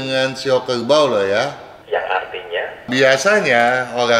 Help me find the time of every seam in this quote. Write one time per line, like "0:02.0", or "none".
0:01.7
0:02.9